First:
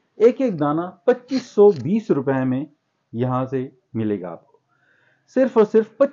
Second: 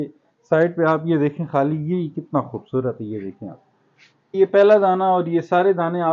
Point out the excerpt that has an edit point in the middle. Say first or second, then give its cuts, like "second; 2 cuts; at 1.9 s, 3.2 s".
second; 1 cut; at 4.3 s